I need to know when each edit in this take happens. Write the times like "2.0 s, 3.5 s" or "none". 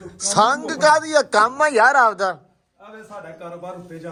none